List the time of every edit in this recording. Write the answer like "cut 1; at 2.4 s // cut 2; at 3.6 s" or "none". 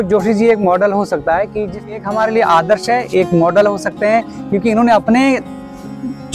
cut 1; at 2.0 s